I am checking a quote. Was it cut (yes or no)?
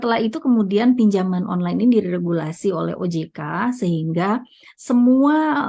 no